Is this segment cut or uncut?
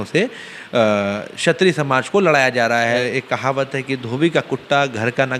cut